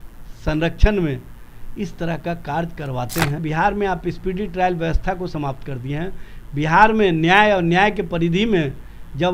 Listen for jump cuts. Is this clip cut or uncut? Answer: cut